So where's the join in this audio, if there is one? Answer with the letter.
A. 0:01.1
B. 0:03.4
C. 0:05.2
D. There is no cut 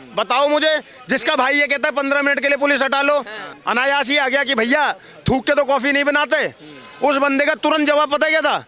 B